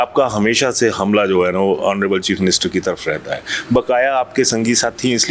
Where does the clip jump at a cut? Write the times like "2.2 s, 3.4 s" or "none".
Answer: none